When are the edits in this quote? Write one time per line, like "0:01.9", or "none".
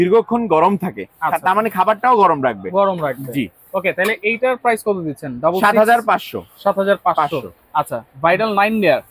none